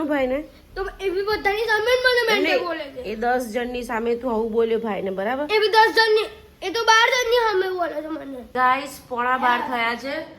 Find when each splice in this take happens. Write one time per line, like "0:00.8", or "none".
0:08.5